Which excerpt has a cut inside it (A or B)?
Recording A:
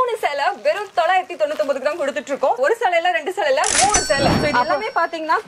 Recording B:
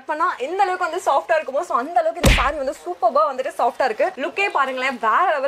A